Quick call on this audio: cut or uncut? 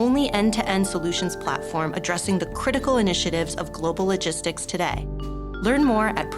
uncut